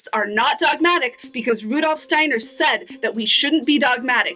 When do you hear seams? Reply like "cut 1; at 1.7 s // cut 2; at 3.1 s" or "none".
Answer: none

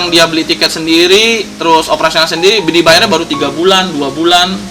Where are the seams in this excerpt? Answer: none

